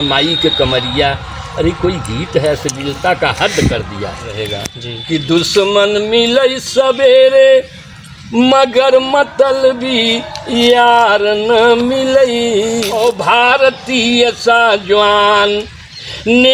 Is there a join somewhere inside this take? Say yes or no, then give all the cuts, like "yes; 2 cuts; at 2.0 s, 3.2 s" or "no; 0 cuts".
yes; 2 cuts; at 4.4 s, 12.9 s